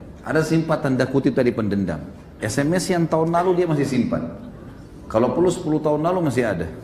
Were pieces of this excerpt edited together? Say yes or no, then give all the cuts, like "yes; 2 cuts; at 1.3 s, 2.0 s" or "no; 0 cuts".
no; 0 cuts